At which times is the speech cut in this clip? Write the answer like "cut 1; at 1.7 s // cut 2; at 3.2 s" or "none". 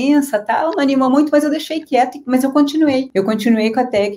cut 1; at 3.1 s